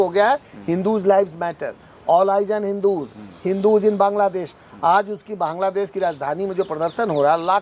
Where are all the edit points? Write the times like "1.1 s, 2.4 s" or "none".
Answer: none